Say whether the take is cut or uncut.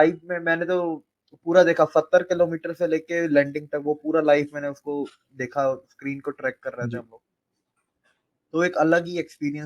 uncut